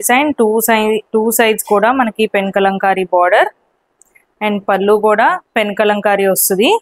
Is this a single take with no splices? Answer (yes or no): yes